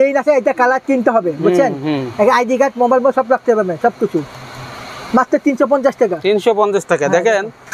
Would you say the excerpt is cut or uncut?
uncut